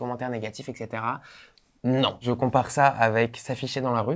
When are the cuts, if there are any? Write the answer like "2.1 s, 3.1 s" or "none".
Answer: 2.2 s